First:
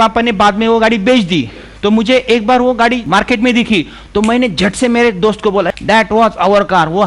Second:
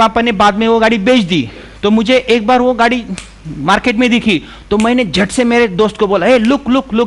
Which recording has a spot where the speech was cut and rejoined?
first; 2 cuts; at 3.0 s, 5.7 s

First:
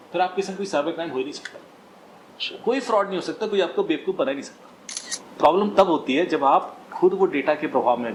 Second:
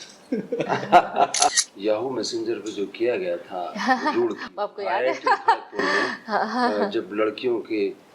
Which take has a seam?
second; 1 cut; at 1.6 s

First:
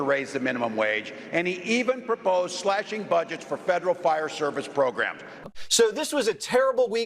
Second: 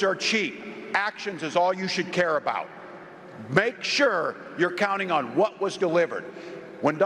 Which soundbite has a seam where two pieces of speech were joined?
first; 1 cut; at 5.3 s

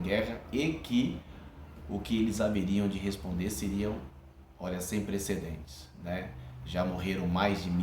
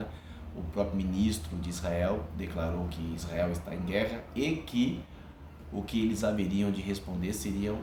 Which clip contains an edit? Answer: first; 1 cut; at 5.5 s

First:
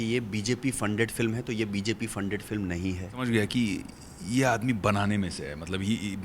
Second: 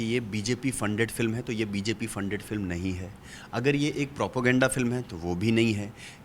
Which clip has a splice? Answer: first; 1 cut; at 3.3 s

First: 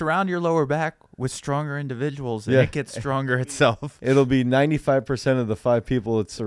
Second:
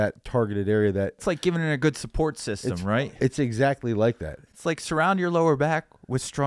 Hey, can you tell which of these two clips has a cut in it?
second; 2 cuts; at 1.2 s, 3.0 s

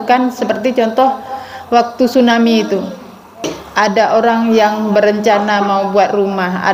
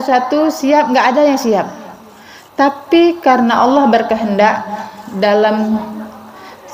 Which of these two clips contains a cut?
first; 1 cut; at 3.5 s

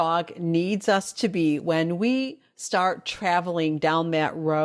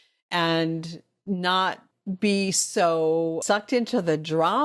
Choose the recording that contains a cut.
second; 2 cuts; at 1.9 s, 3.4 s

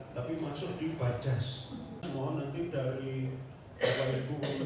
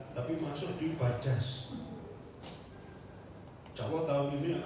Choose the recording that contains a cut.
first; 1 cut; at 2.0 s

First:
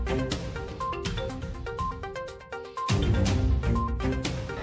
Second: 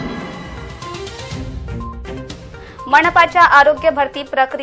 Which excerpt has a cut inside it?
first; 1 cut; at 1.1 s

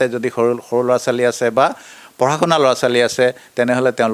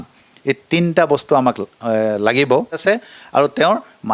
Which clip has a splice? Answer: second; 1 cut; at 2.8 s

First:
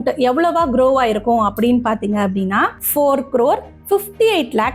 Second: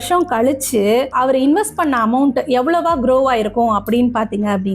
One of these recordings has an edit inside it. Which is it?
second; 1 cut; at 1.1 s

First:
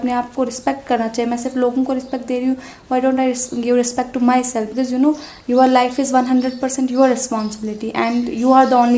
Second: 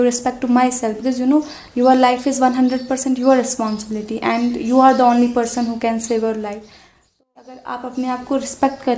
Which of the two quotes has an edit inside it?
second; 1 cut; at 7.1 s

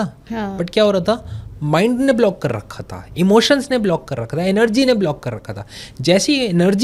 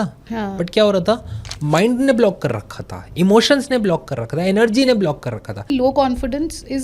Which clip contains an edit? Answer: second; 1 cut; at 5.7 s

